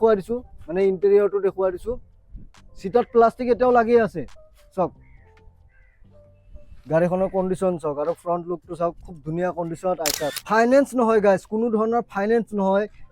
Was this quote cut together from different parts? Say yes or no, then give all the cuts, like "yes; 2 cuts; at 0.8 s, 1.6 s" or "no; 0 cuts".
yes; 1 cut; at 10.4 s